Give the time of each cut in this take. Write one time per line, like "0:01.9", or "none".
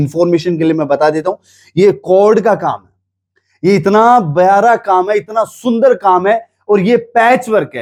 none